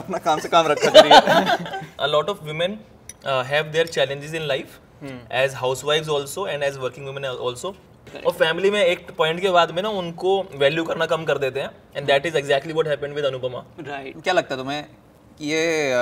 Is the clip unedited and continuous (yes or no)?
no